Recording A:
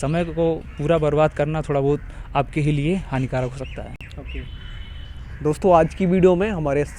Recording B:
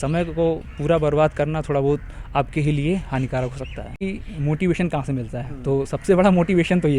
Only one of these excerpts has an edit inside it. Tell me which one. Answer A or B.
B